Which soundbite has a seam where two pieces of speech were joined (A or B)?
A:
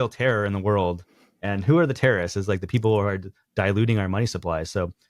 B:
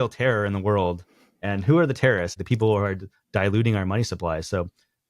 B